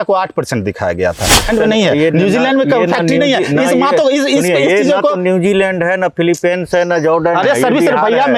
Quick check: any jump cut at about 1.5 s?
yes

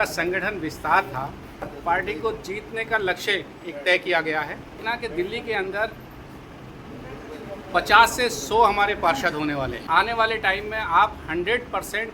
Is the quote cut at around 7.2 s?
no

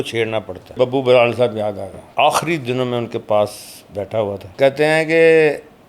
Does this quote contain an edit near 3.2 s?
no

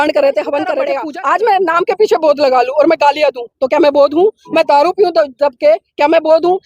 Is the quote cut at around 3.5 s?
no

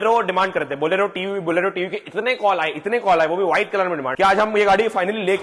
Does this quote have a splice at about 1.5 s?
no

